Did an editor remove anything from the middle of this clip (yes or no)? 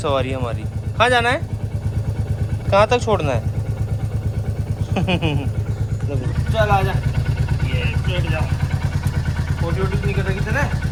no